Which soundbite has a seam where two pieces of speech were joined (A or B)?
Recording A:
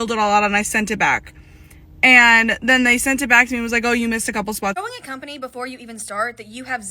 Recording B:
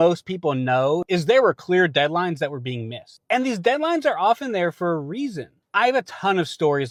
A